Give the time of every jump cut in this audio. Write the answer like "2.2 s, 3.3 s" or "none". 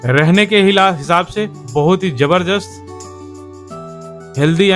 none